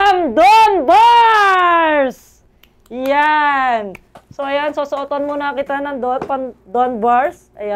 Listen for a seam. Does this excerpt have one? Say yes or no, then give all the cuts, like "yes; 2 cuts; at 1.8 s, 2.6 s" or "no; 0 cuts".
no; 0 cuts